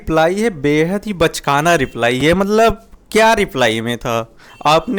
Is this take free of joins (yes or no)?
yes